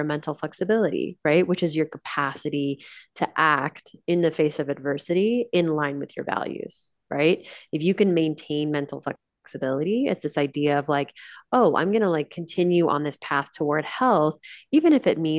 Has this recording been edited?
no; 0 cuts

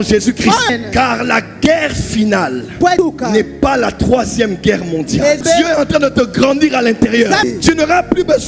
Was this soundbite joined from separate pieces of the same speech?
yes; 2 cuts; at 5.4 s, 7.4 s

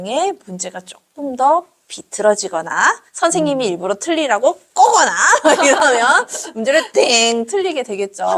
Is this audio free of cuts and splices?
yes; 0 cuts

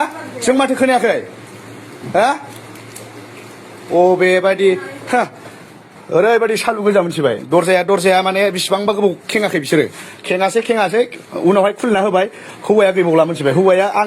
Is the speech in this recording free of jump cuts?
yes; 0 cuts

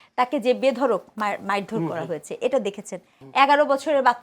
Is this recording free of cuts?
no; 1 cut; at 3.1 s

